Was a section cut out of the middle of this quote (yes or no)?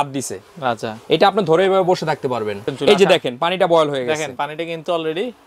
yes